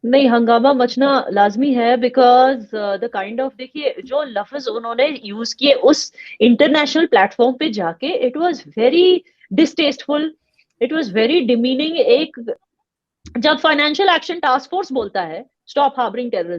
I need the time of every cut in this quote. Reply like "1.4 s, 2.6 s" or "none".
12.7 s